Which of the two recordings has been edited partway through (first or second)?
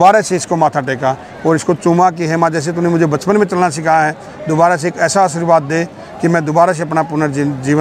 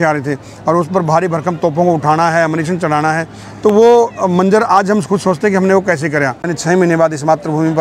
second